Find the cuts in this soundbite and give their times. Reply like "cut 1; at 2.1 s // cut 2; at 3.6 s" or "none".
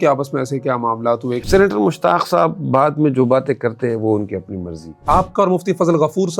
cut 1; at 1.4 s // cut 2; at 5.0 s